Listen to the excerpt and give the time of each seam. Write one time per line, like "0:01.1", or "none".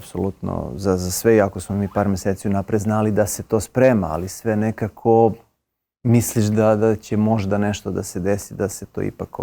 none